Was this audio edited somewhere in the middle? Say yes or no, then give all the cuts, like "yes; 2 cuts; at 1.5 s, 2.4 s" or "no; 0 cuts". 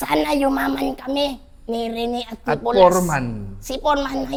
no; 0 cuts